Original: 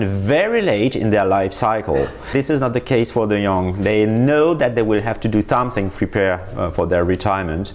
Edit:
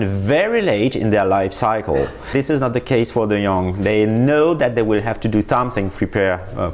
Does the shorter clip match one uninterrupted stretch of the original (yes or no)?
yes